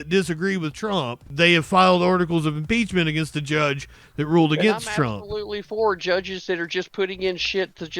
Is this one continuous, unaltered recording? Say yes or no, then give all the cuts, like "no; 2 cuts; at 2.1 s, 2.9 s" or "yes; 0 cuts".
no; 1 cut; at 1.2 s